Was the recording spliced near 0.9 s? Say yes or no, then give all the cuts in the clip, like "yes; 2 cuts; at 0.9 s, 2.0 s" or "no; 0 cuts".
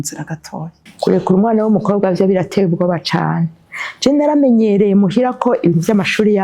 yes; 1 cut; at 0.9 s